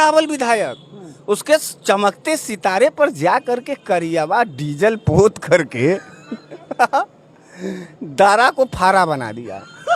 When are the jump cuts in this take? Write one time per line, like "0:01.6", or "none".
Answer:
none